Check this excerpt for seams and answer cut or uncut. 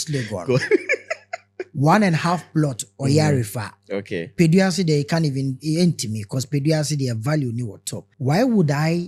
cut